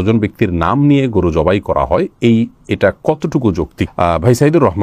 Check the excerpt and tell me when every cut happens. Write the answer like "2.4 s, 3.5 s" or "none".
none

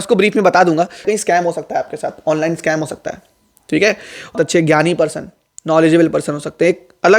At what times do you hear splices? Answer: 1.0 s, 4.3 s

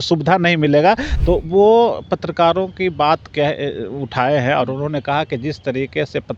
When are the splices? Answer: 1.1 s

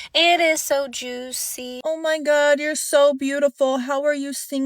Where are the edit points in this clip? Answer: 1.8 s

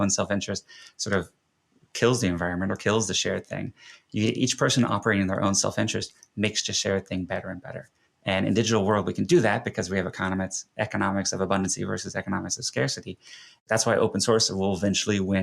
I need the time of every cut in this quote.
13.6 s

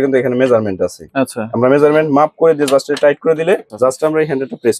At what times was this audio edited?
3.7 s

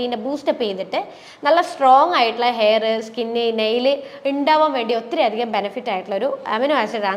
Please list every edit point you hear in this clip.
none

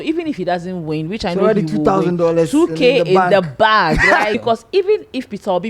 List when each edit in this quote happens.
4.4 s

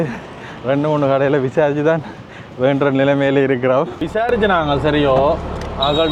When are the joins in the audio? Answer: 4.0 s

